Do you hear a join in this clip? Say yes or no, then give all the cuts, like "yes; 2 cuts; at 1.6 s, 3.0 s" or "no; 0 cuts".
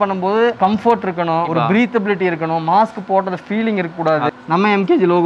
yes; 1 cut; at 4.3 s